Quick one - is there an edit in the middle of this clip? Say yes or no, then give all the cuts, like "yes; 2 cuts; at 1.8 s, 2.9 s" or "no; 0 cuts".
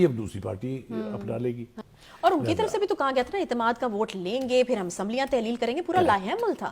yes; 1 cut; at 1.7 s